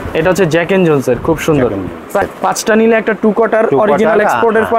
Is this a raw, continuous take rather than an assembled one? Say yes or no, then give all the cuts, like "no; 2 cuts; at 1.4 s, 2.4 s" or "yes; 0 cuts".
no; 1 cut; at 2.2 s